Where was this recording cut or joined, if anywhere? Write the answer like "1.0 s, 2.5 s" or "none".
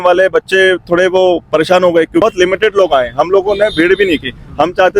2.2 s